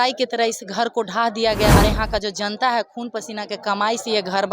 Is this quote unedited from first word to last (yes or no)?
no